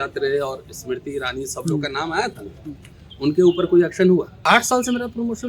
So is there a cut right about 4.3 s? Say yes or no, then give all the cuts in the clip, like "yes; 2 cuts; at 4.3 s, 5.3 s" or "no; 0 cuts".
yes; 1 cut; at 4.3 s